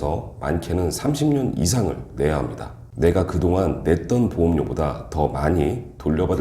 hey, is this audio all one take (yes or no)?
no